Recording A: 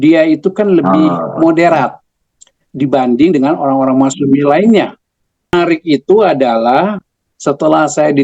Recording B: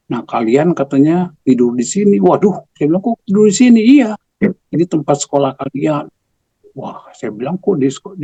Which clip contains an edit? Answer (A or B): A